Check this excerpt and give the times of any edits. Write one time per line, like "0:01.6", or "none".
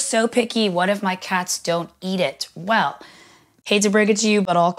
none